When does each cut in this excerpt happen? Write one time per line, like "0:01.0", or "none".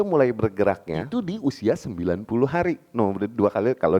0:00.9